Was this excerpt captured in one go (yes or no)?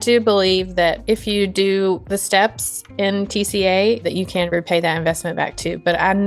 no